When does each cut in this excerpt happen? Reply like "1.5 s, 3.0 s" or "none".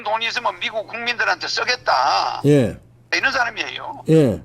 3.1 s